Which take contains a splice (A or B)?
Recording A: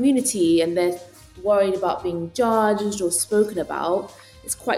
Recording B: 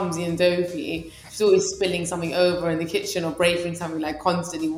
A